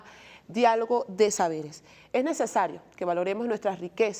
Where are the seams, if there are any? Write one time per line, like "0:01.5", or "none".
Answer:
0:03.0